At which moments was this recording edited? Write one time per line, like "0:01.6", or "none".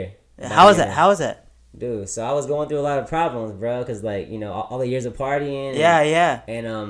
none